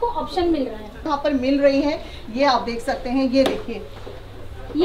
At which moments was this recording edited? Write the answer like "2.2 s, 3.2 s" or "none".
1.0 s